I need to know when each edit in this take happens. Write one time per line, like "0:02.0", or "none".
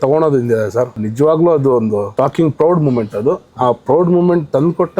0:01.0
0:02.1